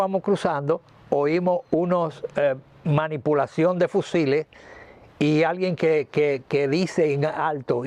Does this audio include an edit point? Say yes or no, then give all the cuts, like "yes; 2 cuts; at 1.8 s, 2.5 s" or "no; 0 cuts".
no; 0 cuts